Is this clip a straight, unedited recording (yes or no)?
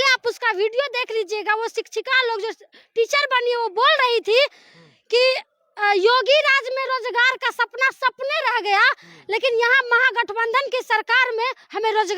yes